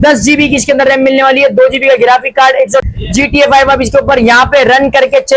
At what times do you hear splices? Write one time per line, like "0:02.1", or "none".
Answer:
0:02.8